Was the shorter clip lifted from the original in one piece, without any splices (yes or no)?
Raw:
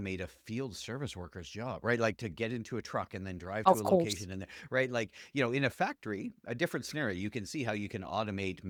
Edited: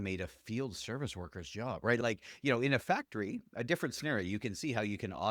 no